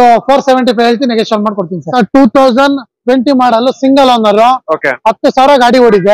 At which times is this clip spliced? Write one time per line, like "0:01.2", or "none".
0:01.8